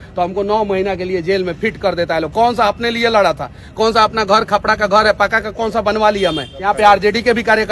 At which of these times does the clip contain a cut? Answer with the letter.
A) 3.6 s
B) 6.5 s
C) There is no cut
B